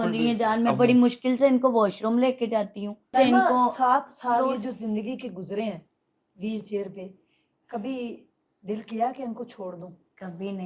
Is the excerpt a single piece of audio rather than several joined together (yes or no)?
no